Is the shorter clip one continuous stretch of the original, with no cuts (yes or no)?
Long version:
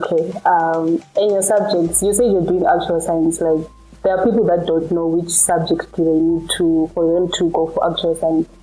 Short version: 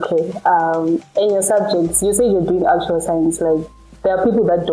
yes